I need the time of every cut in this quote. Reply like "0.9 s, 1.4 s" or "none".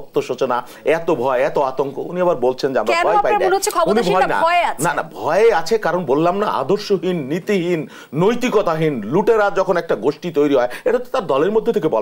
none